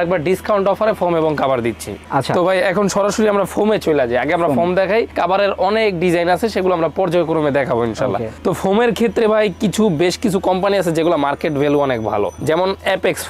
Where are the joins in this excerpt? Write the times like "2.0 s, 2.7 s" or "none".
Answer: none